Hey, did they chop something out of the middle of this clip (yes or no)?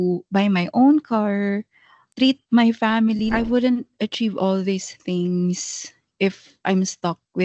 yes